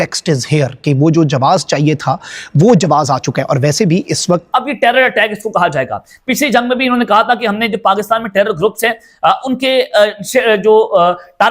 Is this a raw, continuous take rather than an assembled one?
no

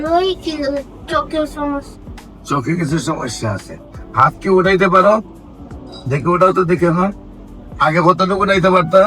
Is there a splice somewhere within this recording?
no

